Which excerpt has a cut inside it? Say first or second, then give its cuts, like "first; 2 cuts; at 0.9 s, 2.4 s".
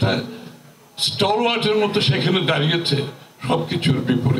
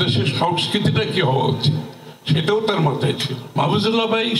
second; 1 cut; at 3.4 s